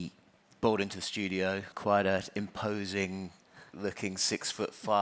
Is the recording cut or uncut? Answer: cut